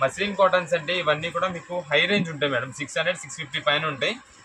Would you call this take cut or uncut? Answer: uncut